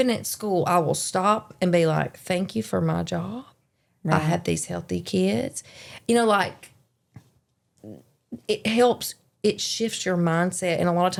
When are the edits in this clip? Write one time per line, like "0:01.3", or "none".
none